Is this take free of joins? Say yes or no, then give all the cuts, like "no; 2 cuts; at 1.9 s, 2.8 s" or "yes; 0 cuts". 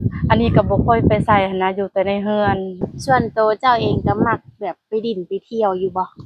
no; 1 cut; at 2.8 s